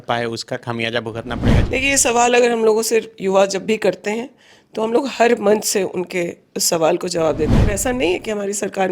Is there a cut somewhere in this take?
yes; 2 cuts; at 1.6 s, 7.7 s

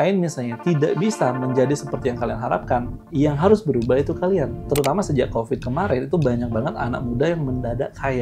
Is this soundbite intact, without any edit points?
no; 1 cut; at 4.7 s

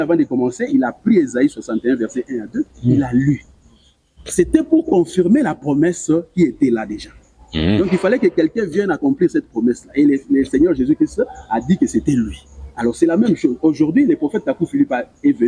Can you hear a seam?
no; 0 cuts

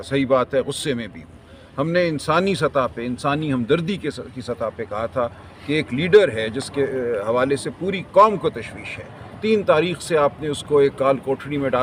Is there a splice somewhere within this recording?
no; 0 cuts

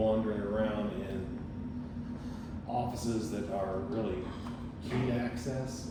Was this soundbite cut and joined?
no; 0 cuts

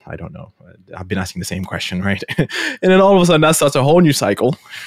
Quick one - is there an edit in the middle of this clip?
no; 0 cuts

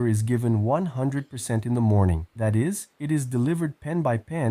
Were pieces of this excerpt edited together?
yes; 1 cut; at 2.6 s

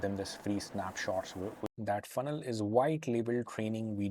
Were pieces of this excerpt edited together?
yes; 1 cut; at 1.7 s

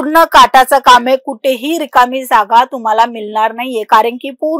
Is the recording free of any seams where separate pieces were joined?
yes; 0 cuts

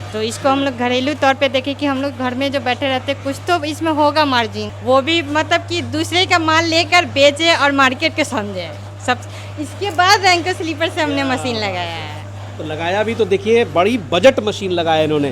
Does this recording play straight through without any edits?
no; 1 cut; at 4.7 s

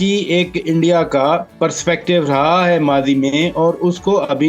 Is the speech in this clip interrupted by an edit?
yes; 1 cut; at 1.5 s

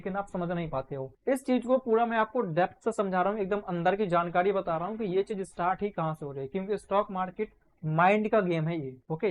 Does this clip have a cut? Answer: no; 0 cuts

